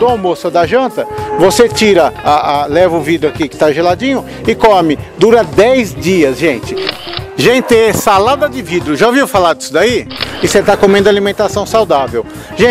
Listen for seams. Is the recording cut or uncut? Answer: cut